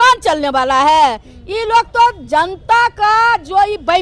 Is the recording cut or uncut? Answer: uncut